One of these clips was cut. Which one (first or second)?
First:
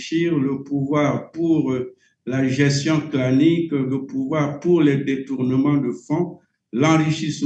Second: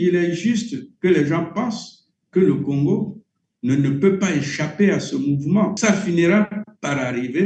second